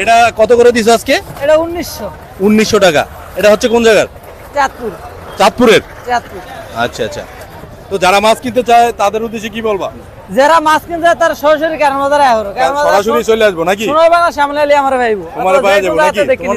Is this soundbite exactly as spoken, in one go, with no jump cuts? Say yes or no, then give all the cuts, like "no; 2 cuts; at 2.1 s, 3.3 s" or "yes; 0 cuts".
yes; 0 cuts